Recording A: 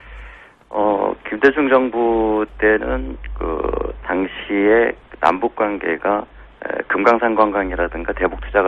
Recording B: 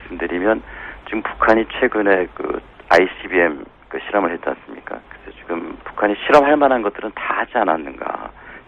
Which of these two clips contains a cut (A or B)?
B